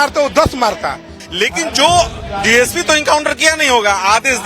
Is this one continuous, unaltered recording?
no; 1 cut; at 1.1 s

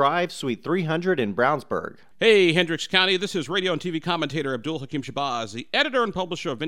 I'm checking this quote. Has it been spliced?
yes; 1 cut; at 2.0 s

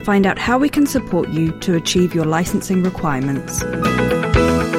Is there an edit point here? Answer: yes; 1 cut; at 3.6 s

